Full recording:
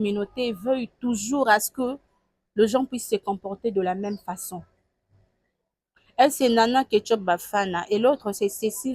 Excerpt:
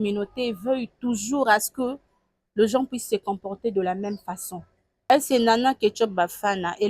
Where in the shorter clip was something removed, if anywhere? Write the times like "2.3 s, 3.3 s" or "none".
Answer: 5.1 s